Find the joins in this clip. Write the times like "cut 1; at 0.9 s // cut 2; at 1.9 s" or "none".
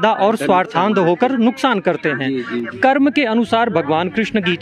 cut 1; at 2.7 s